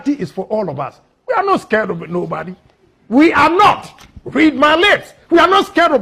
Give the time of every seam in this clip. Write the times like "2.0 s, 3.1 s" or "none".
none